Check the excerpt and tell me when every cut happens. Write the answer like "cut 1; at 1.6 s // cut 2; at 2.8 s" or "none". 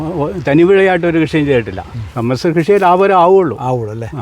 cut 1; at 2.1 s

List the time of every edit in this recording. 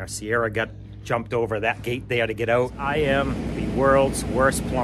cut 1; at 2.8 s

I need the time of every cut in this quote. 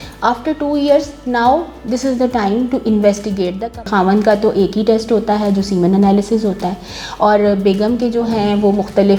cut 1; at 3.8 s

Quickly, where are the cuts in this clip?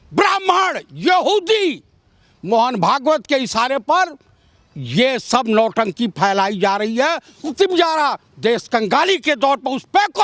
cut 1; at 7.4 s

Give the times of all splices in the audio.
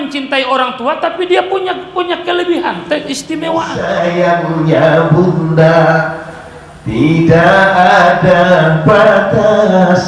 cut 1; at 3.8 s

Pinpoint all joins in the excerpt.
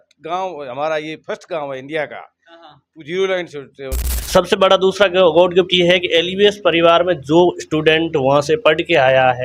cut 1; at 4.1 s

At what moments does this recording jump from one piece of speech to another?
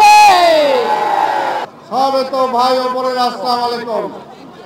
cut 1; at 1.6 s

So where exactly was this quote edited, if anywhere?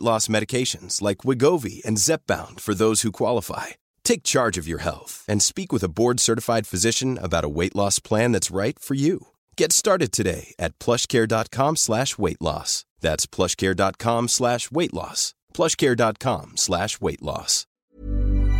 cut 1; at 17.6 s

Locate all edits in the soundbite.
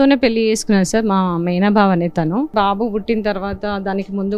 cut 1; at 2.5 s

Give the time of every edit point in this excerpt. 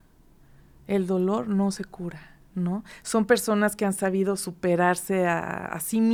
none

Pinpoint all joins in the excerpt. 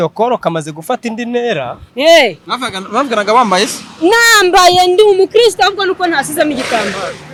none

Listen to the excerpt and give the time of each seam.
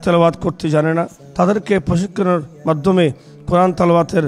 cut 1; at 1.2 s

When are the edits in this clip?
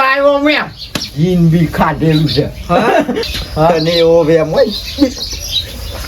cut 1; at 3.2 s

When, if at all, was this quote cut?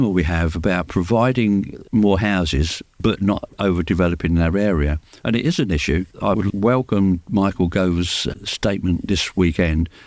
cut 1; at 1.8 s // cut 2; at 2.8 s // cut 3; at 3.6 s // cut 4; at 6.1 s // cut 5; at 8.2 s

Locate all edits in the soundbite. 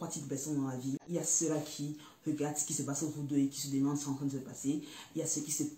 cut 1; at 1.0 s

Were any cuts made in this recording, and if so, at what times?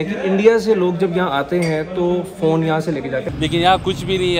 cut 1; at 3.3 s

